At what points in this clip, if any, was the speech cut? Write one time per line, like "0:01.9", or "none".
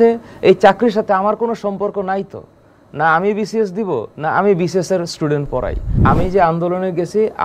0:05.9